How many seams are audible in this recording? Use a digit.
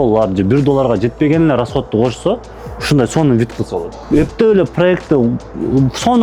1